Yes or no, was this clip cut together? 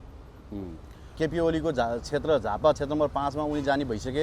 yes